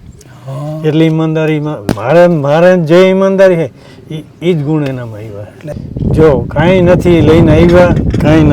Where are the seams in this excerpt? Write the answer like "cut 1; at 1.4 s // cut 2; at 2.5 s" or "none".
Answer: cut 1; at 5.7 s